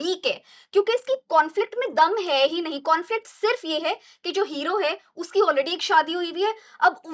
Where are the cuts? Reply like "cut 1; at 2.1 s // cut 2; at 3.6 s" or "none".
none